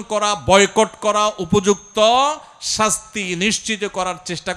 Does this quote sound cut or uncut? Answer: uncut